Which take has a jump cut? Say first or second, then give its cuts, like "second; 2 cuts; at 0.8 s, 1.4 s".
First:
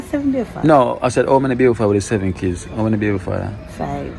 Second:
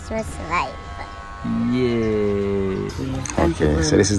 second; 1 cut; at 2.9 s